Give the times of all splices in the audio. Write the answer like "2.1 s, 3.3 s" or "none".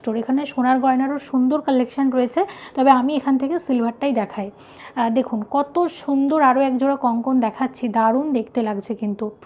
none